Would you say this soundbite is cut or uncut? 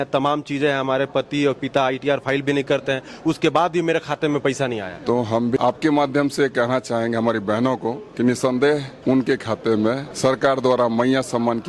cut